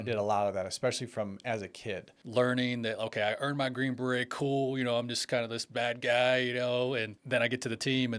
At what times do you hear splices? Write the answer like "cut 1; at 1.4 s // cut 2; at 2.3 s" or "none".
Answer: cut 1; at 2.1 s // cut 2; at 7.1 s